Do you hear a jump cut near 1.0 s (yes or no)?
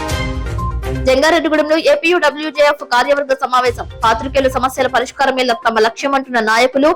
yes